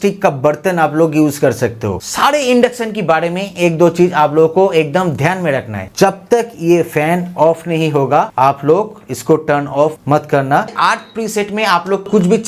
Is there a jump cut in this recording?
yes; 3 cuts; at 2.0 s, 5.9 s, 10.7 s

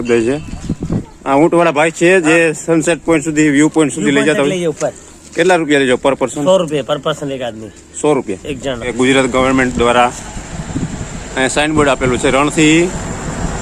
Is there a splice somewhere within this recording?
yes; 2 cuts; at 1.1 s, 8.9 s

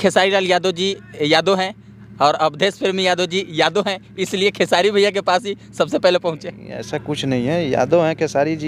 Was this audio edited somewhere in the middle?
no; 0 cuts

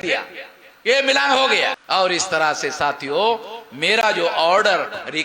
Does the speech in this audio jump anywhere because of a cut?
yes; 1 cut; at 1.8 s

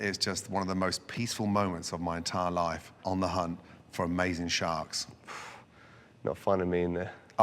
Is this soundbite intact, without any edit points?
no; 1 cut; at 3.0 s

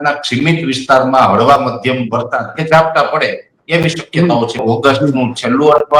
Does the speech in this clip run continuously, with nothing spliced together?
no; 1 cut; at 4.6 s

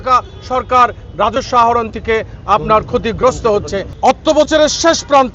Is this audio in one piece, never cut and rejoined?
no; 1 cut; at 3.8 s

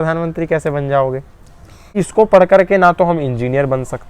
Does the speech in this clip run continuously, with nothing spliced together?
no; 1 cut; at 1.9 s

